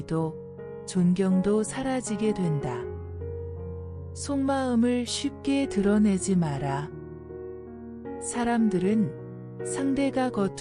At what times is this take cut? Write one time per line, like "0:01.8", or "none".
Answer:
0:02.8
0:04.2

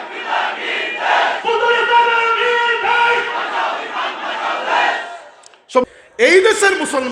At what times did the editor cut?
0:05.8

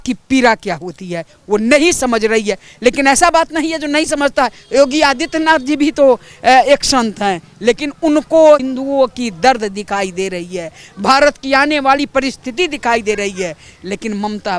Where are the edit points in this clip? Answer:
0:08.6

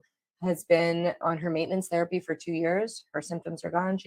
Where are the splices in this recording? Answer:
0:01.2

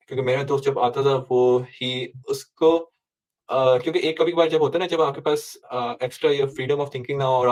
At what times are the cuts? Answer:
none

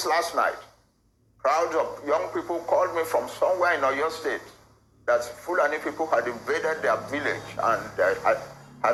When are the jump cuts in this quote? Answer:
none

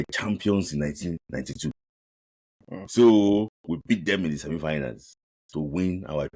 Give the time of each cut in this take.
none

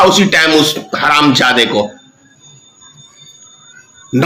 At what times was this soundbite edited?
none

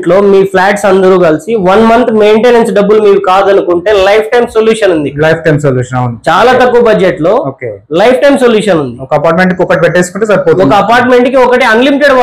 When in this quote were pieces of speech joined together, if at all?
none

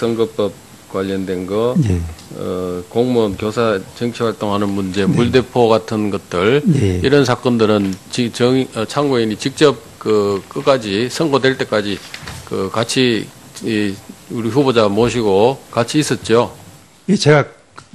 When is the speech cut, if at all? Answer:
none

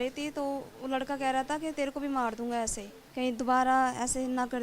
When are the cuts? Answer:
0:03.0

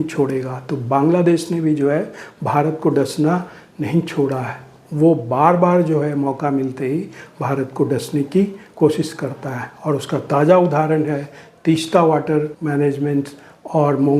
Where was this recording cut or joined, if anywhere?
0:12.6

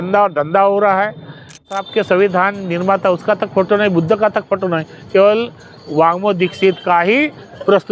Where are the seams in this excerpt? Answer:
0:01.7

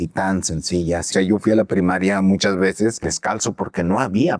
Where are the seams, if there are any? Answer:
0:01.1
0:03.1

